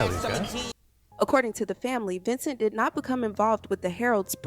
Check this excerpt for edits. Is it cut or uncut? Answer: cut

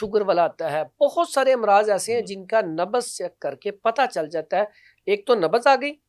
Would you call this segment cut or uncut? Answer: uncut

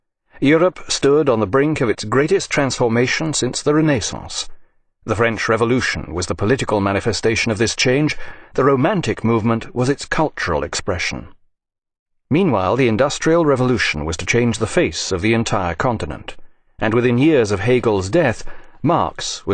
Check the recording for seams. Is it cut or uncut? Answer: uncut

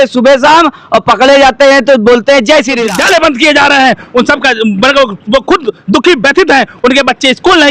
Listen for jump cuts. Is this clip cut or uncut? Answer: cut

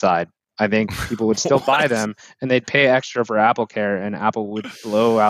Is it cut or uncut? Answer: uncut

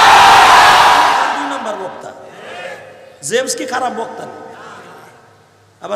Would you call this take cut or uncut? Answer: cut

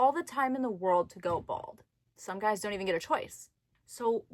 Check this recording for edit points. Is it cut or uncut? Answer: uncut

